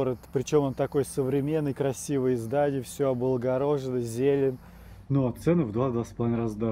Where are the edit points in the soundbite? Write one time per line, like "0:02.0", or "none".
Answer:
0:04.6